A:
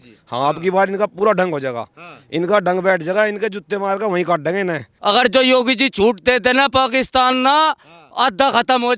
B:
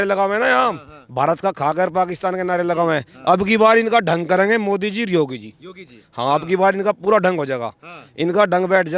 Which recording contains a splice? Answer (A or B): A